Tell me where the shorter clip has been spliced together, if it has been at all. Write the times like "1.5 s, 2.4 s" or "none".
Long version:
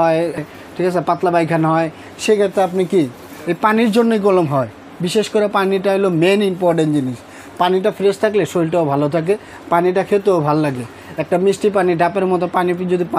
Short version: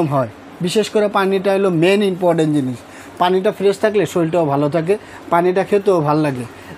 none